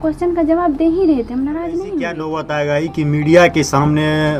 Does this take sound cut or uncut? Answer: cut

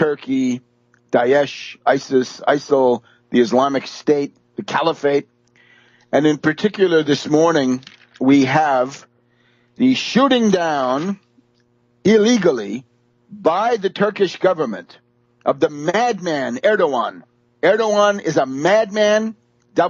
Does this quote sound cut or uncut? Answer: uncut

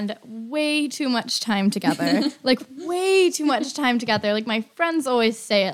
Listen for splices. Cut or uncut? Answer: uncut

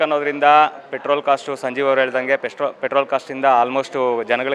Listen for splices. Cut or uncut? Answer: uncut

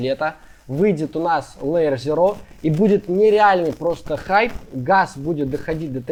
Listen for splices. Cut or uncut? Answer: uncut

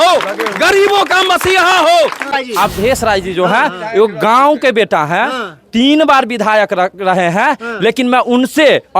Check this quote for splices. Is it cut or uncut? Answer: cut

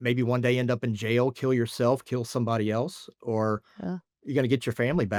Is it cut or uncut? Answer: uncut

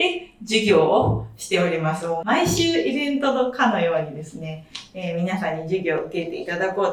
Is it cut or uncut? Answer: uncut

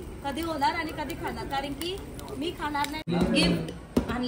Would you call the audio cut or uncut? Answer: cut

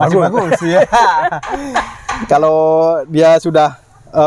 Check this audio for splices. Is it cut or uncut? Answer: uncut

